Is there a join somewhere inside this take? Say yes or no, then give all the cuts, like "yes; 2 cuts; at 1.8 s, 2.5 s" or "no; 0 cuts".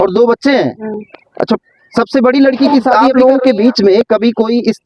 yes; 1 cut; at 3.0 s